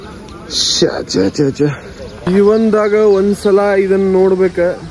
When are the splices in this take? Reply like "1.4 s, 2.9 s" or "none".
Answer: 2.1 s

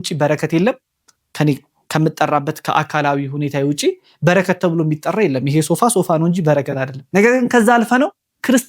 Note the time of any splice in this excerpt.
6.9 s

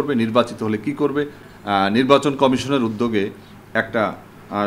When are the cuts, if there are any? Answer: 1.4 s

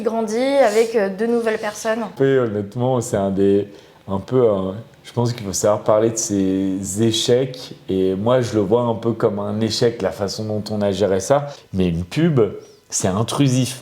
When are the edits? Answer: 2.1 s, 11.6 s

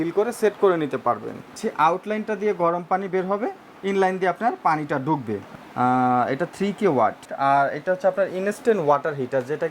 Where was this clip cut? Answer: 1.6 s, 5.4 s, 7.3 s

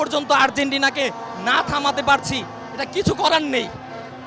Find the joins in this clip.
none

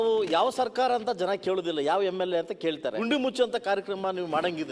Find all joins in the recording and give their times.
3.0 s

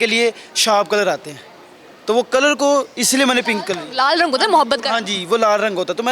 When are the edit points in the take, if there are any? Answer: none

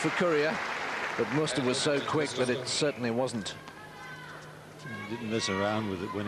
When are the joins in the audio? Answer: none

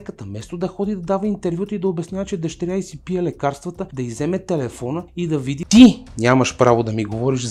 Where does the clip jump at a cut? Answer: 3.9 s, 5.2 s

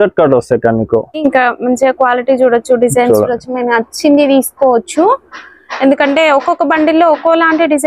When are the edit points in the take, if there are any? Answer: 1.2 s

